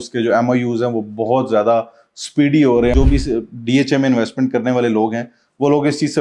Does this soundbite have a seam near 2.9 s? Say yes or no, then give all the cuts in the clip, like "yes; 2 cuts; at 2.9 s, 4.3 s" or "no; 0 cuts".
yes; 1 cut; at 2.9 s